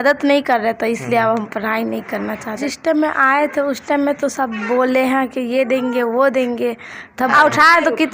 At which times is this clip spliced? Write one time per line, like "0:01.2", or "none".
0:02.6
0:07.3

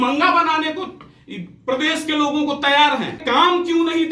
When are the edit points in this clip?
0:03.2

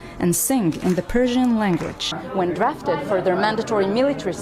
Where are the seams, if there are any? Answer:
0:02.1

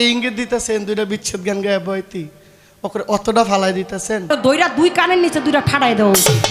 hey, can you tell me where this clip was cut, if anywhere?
0:04.3

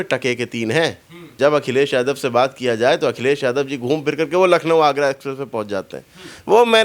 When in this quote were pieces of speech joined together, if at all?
0:01.3

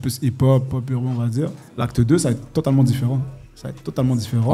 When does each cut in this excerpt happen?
0:01.6

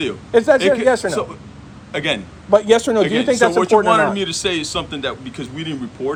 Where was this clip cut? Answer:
none

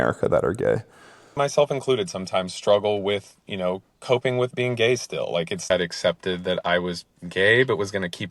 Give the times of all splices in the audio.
0:01.2
0:05.7

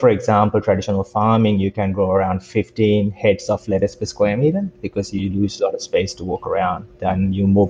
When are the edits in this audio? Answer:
none

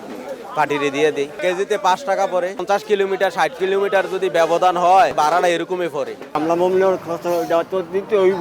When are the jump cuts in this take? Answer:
0:01.4
0:02.6
0:06.3

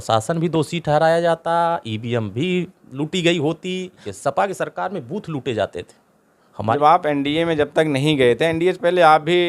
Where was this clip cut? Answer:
0:04.0
0:06.7

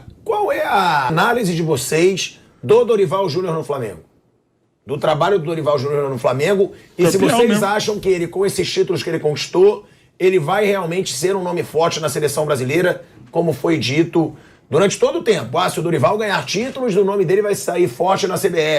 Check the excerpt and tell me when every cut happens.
0:01.1

